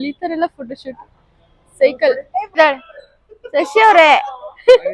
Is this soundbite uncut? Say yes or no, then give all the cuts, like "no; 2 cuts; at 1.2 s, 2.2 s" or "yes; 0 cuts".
no; 1 cut; at 2.5 s